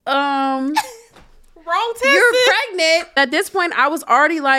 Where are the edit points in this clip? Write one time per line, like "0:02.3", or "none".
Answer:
0:03.1

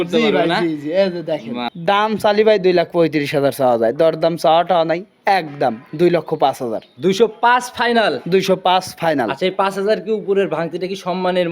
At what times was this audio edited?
0:01.7

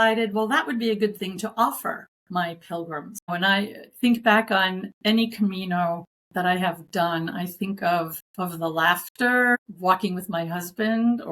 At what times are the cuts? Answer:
0:02.1
0:03.3
0:04.9
0:06.1
0:08.2
0:09.6

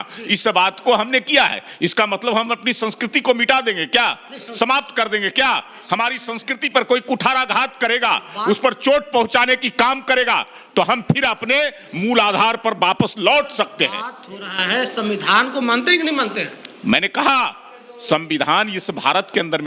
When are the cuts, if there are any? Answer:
none

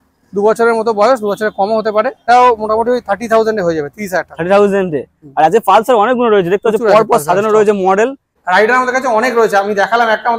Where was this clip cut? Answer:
0:02.2
0:08.3

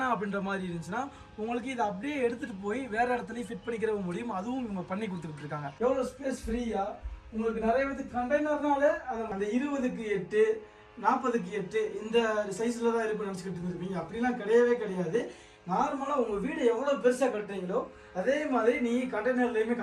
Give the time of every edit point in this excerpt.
0:05.7
0:09.3

